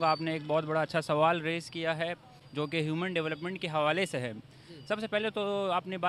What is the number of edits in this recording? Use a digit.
0